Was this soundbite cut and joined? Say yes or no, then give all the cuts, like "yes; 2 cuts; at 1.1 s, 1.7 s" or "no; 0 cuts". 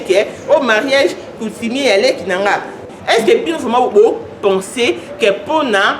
yes; 1 cut; at 2.8 s